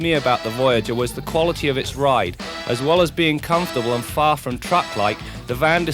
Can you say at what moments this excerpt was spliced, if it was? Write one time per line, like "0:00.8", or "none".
none